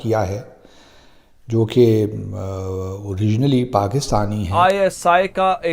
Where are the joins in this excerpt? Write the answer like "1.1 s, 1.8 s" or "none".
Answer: 4.5 s